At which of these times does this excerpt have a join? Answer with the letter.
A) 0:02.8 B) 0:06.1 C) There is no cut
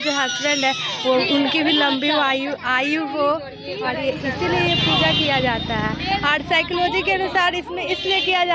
C